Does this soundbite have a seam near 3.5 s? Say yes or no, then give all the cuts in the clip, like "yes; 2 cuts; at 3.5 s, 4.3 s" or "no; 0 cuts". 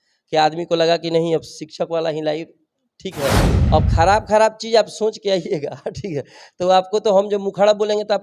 yes; 1 cut; at 3.5 s